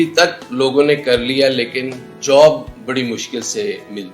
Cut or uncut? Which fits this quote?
cut